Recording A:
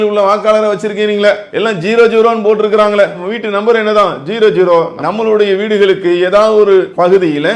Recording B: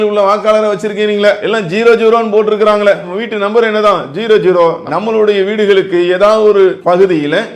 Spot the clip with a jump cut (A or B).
B